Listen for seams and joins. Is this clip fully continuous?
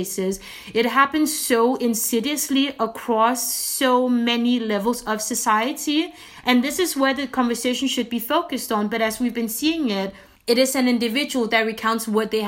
yes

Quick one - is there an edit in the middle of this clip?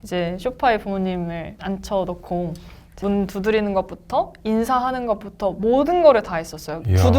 yes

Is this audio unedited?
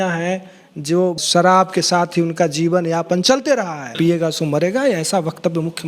no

